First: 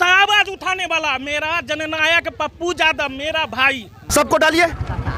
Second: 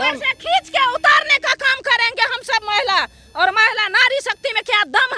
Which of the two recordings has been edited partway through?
first; 1 cut; at 4.1 s

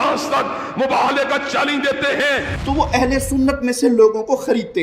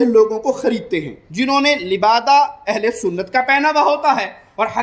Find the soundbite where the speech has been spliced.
first; 1 cut; at 2.5 s

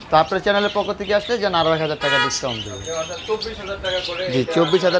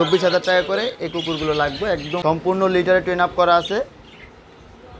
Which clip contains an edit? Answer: second; 1 cut; at 2.1 s

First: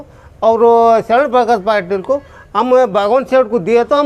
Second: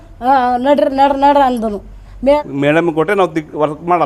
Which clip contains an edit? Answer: second; 1 cut; at 2.4 s

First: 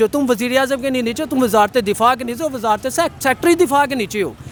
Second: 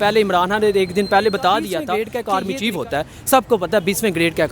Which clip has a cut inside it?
second; 1 cut; at 1.8 s

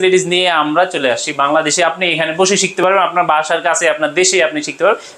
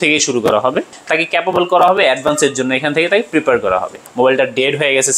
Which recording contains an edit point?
second; 2 cuts; at 1.0 s, 4.0 s

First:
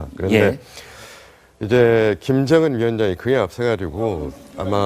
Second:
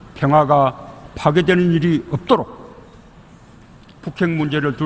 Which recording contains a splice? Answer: first; 1 cut; at 3.9 s

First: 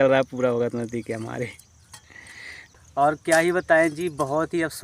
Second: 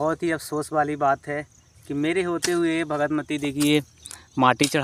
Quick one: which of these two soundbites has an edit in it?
first; 1 cut; at 2.5 s

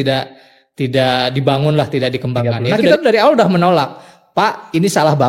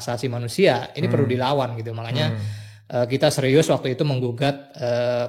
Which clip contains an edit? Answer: first; 1 cut; at 2.9 s

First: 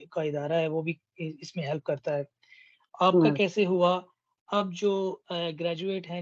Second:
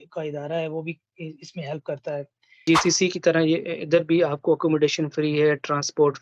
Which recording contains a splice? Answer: second; 1 cut; at 2.6 s

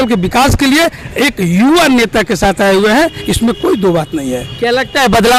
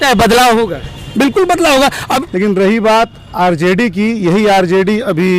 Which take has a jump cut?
second; 1 cut; at 2.0 s

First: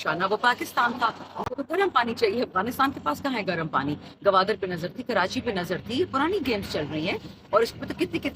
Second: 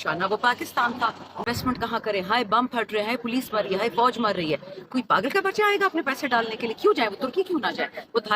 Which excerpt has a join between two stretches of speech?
second; 1 cut; at 1.5 s

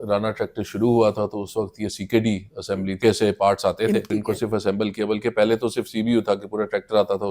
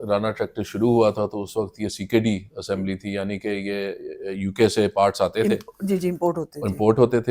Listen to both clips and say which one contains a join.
first; 2 cuts; at 3.0 s, 4.1 s

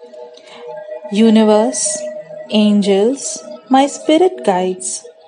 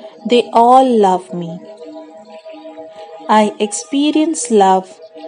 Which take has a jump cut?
second; 2 cuts; at 1.6 s, 2.9 s

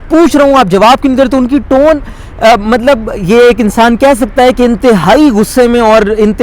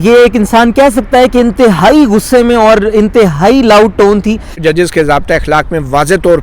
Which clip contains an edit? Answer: second; 1 cut; at 4.6 s

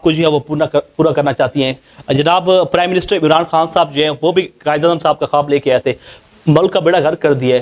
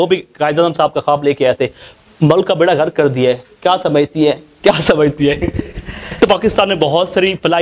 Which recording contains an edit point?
second; 1 cut; at 6.2 s

